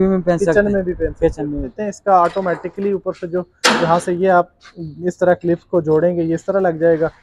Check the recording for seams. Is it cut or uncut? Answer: cut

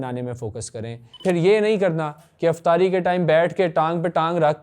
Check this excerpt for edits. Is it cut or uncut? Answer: cut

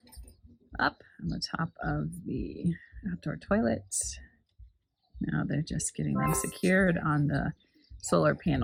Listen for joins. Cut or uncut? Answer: uncut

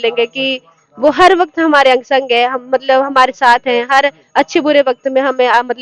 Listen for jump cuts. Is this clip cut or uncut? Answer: uncut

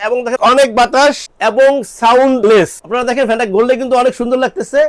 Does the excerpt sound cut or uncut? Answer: uncut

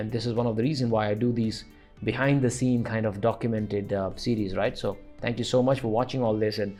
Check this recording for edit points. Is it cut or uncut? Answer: uncut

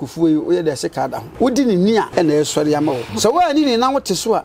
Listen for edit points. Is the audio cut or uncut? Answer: cut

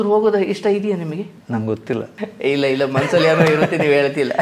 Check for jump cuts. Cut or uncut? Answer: cut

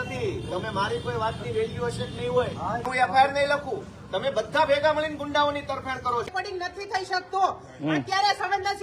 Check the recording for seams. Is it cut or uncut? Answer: cut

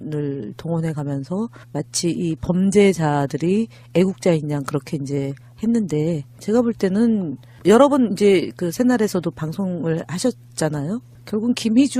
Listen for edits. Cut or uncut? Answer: uncut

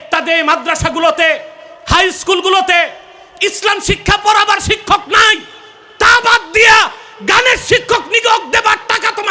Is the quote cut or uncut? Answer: uncut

